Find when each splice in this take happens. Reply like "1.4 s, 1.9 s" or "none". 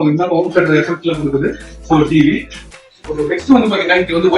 2.5 s